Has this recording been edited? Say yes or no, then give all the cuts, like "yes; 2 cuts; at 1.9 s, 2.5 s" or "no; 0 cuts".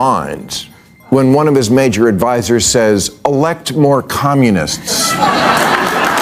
no; 0 cuts